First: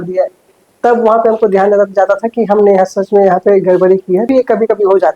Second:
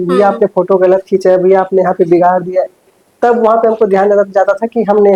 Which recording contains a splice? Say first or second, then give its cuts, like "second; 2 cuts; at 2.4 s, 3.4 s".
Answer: first; 1 cut; at 4.3 s